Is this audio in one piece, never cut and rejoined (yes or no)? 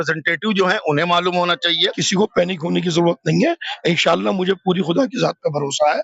no